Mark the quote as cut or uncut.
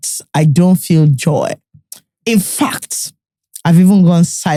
uncut